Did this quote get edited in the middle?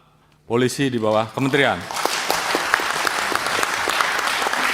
no; 0 cuts

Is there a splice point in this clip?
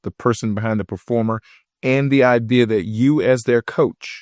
no; 0 cuts

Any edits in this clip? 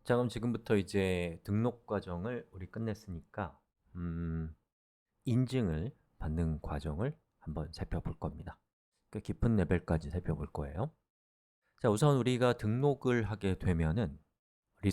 yes; 1 cut; at 1.2 s

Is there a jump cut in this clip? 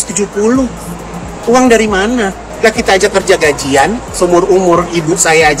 yes; 2 cuts; at 2.4 s, 4.1 s

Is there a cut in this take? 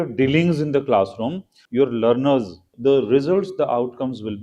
yes; 2 cuts; at 1.6 s, 2.7 s

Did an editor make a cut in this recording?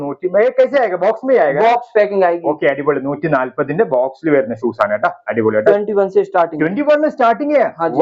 yes; 1 cut; at 5.7 s

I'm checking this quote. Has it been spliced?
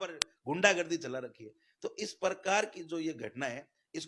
no; 0 cuts

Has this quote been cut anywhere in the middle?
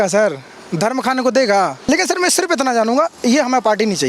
yes; 1 cut; at 1.9 s

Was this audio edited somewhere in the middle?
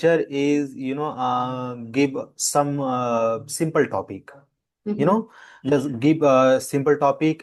no; 0 cuts

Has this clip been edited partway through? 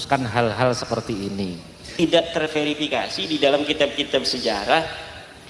yes; 1 cut; at 1.8 s

